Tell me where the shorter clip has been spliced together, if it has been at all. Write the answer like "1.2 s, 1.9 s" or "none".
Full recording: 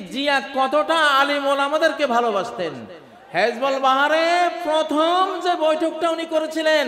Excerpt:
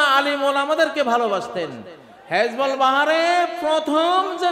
none